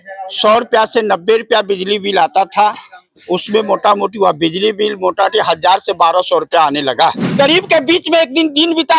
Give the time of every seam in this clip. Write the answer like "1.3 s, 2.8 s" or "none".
7.3 s